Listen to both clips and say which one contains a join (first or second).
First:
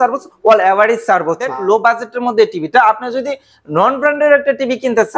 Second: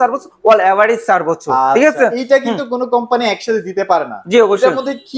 first